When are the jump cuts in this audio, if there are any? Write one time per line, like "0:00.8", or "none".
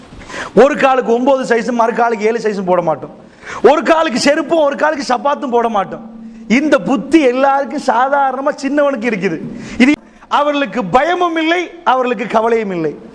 0:04.5
0:10.0